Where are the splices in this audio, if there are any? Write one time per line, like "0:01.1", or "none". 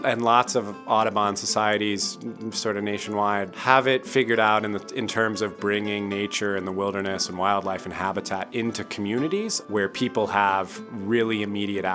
0:03.5
0:09.6